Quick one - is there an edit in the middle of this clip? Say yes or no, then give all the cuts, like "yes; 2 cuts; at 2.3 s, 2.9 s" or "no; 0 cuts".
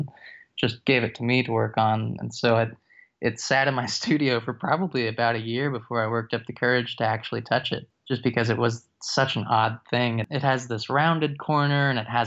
yes; 2 cuts; at 7.9 s, 10.2 s